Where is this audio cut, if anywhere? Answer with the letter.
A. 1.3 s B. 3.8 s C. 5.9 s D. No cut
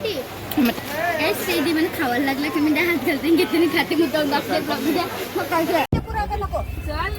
C